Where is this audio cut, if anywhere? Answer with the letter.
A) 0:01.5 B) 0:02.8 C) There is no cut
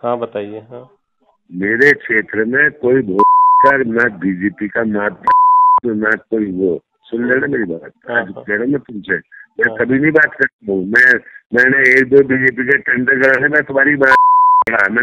C